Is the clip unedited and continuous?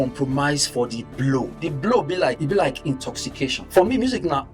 no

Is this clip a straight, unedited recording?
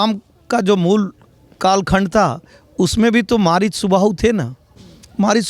yes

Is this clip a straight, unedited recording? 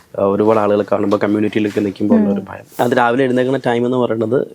no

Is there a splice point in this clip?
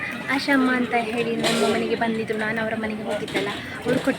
no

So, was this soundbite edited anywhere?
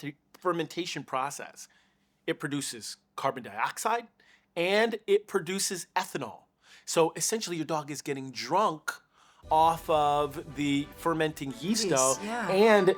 no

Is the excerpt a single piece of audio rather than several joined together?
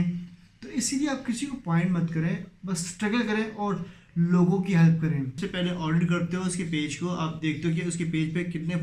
no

